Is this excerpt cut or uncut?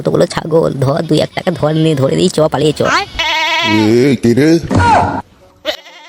cut